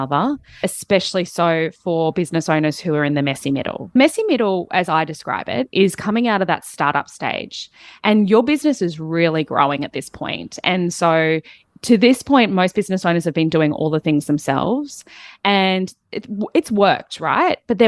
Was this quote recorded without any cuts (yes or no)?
yes